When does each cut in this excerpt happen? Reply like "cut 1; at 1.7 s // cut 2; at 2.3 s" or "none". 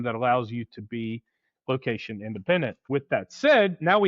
cut 1; at 2.9 s